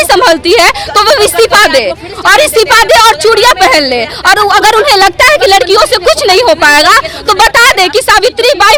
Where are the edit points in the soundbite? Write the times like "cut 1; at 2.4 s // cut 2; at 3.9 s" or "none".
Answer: none